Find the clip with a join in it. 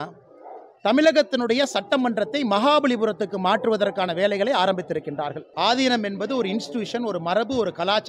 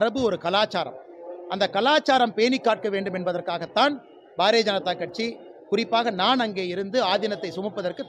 first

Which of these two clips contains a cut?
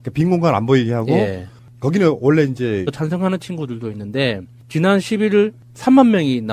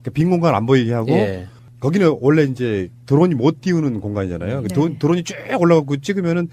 second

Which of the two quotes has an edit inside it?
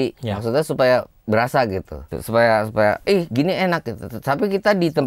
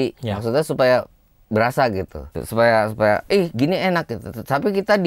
first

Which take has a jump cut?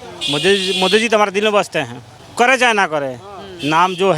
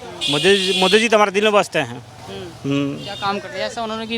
first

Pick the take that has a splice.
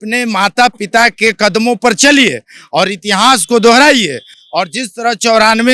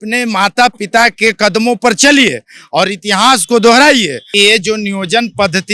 second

